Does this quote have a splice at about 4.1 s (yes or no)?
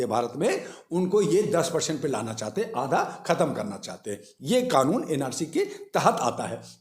no